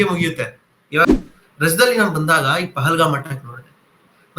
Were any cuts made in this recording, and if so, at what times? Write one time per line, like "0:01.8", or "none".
0:01.0